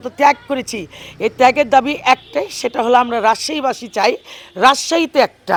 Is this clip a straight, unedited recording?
yes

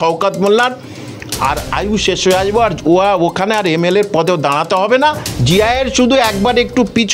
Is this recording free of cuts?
no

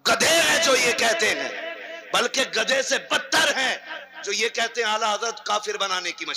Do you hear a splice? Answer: no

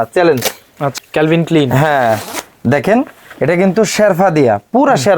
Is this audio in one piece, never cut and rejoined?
no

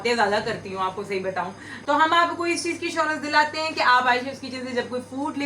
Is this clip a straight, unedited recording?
no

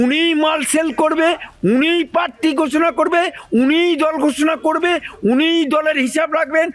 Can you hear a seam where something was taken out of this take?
no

